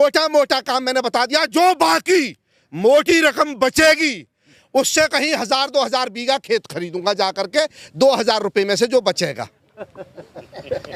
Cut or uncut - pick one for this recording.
uncut